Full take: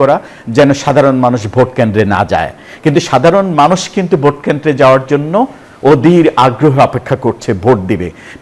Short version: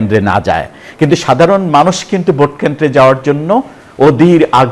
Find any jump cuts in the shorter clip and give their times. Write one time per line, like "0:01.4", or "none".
none